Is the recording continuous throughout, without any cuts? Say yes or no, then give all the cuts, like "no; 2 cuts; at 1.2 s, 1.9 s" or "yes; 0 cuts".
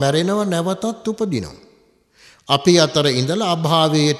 yes; 0 cuts